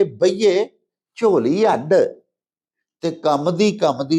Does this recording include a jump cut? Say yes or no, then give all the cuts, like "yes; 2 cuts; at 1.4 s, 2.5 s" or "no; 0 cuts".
no; 0 cuts